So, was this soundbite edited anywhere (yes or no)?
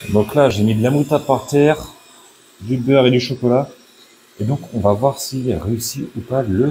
no